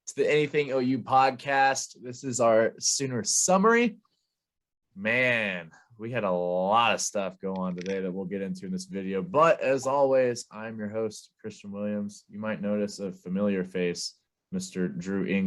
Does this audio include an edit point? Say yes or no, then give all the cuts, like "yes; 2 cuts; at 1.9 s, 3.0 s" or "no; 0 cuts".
no; 0 cuts